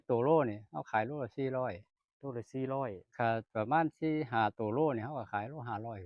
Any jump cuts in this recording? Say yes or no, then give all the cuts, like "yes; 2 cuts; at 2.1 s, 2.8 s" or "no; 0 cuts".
no; 0 cuts